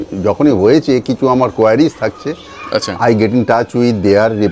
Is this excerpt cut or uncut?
uncut